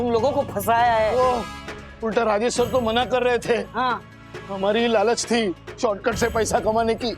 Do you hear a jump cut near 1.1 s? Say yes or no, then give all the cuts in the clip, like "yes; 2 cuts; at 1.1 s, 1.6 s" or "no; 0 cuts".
yes; 1 cut; at 1.1 s